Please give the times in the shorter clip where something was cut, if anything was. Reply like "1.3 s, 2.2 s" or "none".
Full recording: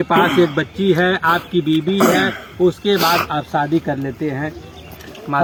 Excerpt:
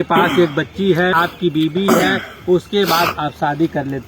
1.2 s

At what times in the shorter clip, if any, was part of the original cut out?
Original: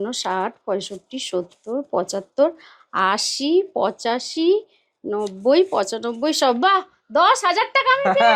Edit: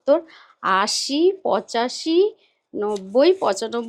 none

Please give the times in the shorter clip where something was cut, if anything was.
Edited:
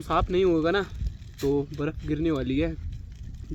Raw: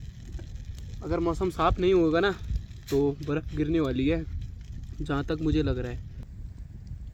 none

